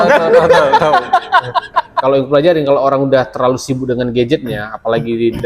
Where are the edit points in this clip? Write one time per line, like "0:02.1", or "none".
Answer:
0:01.9